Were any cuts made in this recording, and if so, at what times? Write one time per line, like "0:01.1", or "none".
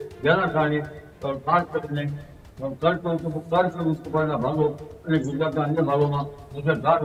none